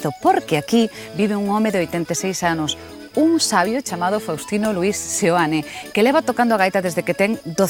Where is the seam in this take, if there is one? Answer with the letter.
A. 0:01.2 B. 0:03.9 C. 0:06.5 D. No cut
B